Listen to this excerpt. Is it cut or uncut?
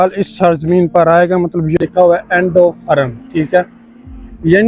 cut